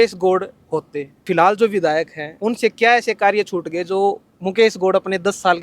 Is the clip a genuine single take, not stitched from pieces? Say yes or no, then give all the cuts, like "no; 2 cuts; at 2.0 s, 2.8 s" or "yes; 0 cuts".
no; 2 cuts; at 1.2 s, 2.2 s